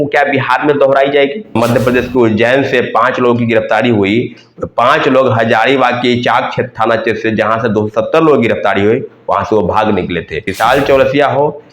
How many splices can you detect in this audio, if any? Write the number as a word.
two